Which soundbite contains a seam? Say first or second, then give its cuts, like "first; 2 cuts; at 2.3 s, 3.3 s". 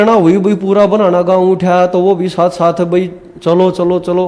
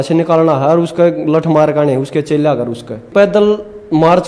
second; 1 cut; at 3.1 s